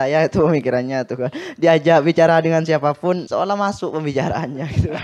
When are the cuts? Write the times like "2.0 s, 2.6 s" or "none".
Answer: 3.2 s